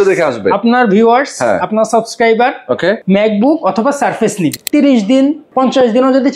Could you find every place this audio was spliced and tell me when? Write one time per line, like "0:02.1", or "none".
0:03.0
0:04.6
0:05.4